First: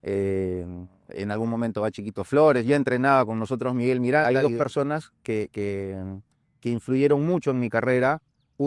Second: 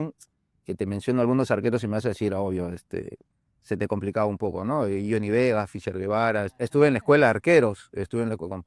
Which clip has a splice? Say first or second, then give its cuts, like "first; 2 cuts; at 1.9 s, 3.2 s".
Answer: first; 1 cut; at 4.2 s